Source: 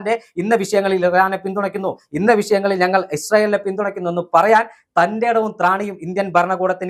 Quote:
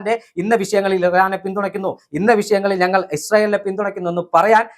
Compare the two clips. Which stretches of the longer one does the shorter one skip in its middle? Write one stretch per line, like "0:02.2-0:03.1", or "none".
none